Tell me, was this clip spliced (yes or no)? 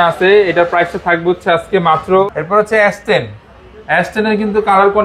yes